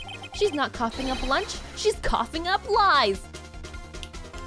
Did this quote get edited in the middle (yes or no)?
no